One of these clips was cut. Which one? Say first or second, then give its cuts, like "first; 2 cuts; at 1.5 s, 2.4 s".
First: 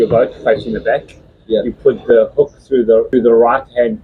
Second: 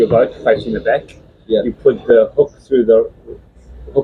first; 1 cut; at 3.1 s